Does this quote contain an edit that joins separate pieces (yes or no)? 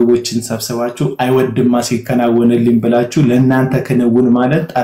no